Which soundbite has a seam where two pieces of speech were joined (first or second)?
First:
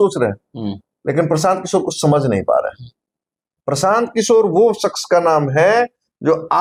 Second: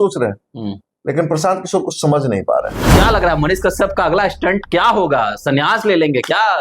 second